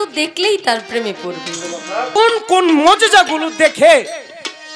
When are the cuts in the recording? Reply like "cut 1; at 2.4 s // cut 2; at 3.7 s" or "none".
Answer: cut 1; at 2.2 s